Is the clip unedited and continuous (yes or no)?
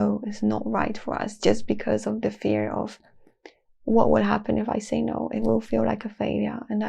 yes